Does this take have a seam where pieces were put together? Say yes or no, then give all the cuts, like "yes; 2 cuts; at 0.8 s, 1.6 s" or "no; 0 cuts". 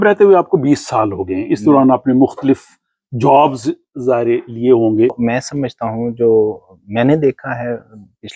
yes; 1 cut; at 5.2 s